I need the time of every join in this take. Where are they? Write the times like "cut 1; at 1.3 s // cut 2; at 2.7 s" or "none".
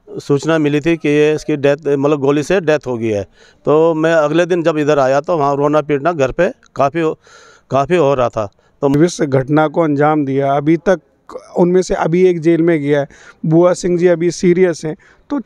cut 1; at 8.9 s